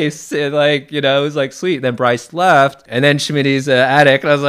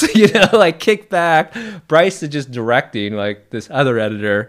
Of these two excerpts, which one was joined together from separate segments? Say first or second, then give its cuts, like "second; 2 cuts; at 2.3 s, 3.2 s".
first; 1 cut; at 2.8 s